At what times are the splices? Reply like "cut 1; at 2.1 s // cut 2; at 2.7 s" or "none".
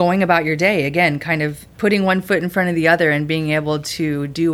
cut 1; at 1.6 s